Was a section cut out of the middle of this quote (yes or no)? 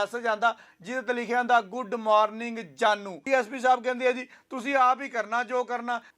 yes